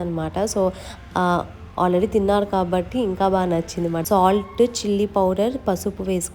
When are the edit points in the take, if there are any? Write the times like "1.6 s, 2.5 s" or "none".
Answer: 4.0 s